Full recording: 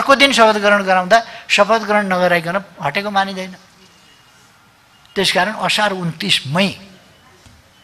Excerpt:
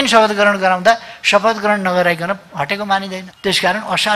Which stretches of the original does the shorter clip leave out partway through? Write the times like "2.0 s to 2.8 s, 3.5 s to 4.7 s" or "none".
3.5 s to 5.0 s